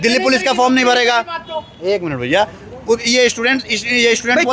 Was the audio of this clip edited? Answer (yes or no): no